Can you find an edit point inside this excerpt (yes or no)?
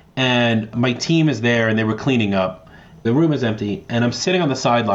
yes